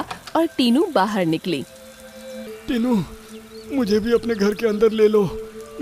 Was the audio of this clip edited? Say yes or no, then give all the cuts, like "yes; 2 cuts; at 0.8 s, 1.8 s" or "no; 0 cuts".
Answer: yes; 1 cut; at 2.5 s